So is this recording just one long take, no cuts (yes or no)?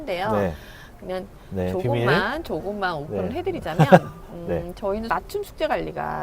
no